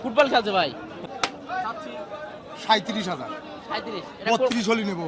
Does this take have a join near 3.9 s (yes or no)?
no